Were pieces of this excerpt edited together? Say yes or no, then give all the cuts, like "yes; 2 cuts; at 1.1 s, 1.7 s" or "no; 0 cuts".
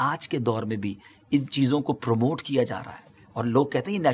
no; 0 cuts